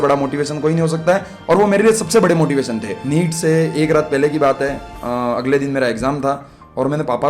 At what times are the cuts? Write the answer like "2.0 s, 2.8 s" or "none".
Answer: 2.9 s